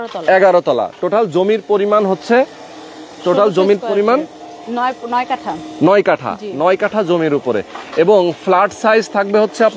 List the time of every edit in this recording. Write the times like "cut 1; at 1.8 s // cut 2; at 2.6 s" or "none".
none